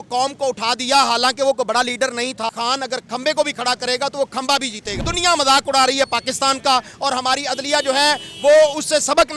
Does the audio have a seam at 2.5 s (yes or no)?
yes